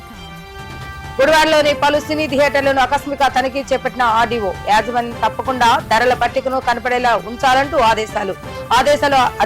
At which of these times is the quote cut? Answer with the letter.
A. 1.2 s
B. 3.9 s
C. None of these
A